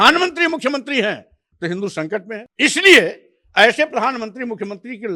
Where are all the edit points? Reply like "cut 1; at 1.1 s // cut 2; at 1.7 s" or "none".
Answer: cut 1; at 2.5 s

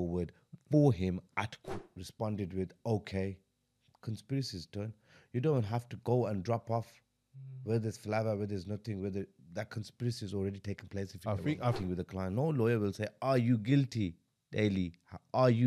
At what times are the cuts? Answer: cut 1; at 1.7 s // cut 2; at 11.7 s

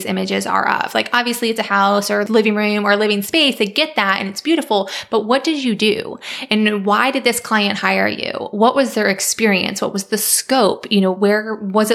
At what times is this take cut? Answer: cut 1; at 2.2 s

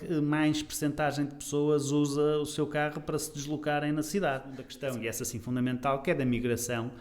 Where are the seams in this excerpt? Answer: cut 1; at 4.7 s

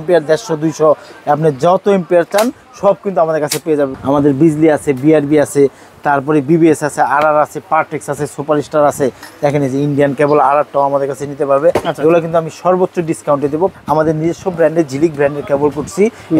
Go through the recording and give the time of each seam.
cut 1; at 4.0 s // cut 2; at 13.7 s

